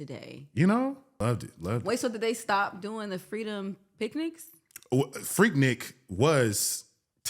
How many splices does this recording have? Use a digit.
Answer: 1